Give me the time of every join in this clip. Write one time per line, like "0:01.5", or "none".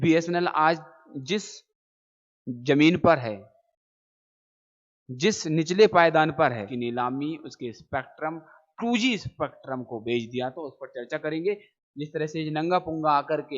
0:06.7
0:11.7